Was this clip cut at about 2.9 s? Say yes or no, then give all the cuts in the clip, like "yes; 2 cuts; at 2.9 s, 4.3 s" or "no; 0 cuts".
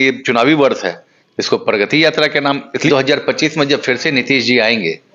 yes; 1 cut; at 2.9 s